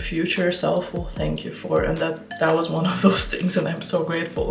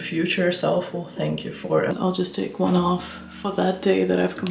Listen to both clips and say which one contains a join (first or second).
second